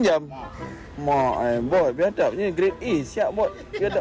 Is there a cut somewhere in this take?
no; 0 cuts

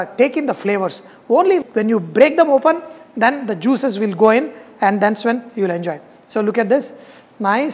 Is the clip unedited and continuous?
yes; 0 cuts

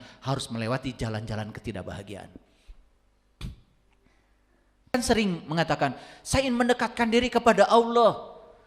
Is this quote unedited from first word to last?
no; 1 cut; at 4.9 s

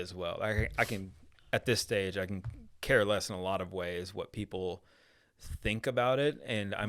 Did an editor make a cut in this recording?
no; 0 cuts

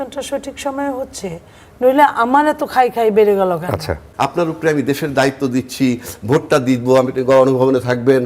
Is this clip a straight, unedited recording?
no; 1 cut; at 4.0 s

